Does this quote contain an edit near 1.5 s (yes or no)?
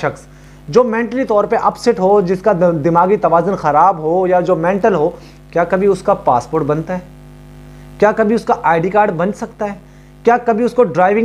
no